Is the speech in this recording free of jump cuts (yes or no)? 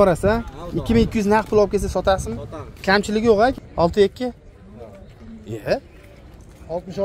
no